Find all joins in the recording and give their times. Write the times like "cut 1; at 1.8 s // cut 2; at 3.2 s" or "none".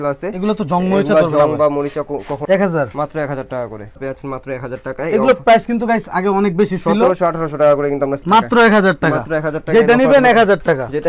cut 1; at 2.4 s // cut 2; at 4.0 s // cut 3; at 8.2 s